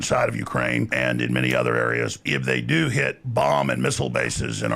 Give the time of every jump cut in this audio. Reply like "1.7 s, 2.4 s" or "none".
0.9 s, 2.2 s, 3.2 s